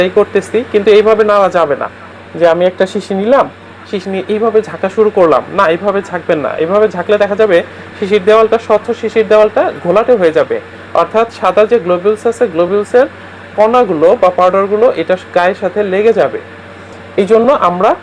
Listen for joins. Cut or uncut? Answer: uncut